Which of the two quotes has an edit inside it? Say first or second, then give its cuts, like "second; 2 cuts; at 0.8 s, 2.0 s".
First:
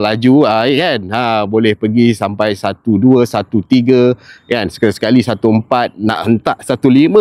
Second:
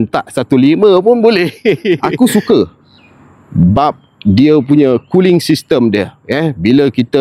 second; 1 cut; at 2.0 s